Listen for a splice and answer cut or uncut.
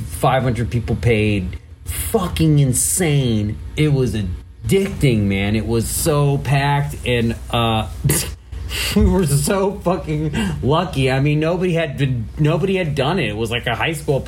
cut